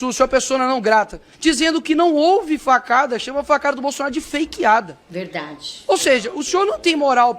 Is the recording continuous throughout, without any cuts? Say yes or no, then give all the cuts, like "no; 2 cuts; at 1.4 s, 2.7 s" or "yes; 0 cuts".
no; 1 cut; at 1.2 s